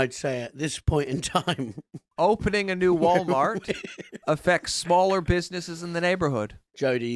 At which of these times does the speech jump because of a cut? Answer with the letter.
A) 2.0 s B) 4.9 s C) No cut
C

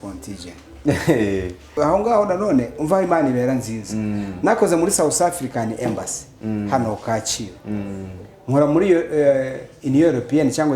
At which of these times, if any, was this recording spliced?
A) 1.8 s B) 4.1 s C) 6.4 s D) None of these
A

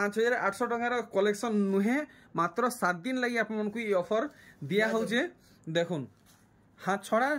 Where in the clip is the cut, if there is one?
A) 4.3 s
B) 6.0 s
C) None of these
C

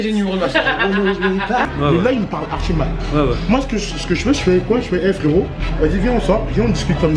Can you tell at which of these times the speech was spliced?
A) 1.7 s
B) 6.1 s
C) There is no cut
A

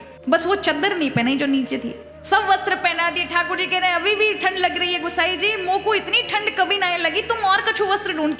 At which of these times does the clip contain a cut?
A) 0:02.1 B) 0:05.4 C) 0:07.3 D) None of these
A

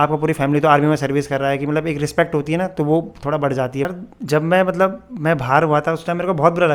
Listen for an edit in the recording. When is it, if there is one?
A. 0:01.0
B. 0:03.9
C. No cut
B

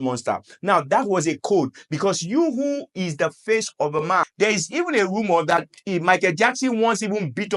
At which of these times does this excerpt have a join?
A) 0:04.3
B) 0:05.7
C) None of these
A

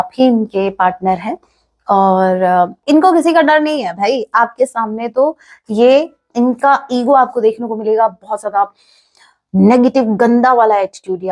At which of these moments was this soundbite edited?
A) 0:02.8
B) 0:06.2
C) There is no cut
A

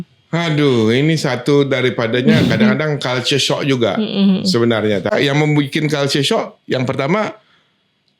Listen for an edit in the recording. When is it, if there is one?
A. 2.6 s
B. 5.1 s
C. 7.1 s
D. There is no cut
B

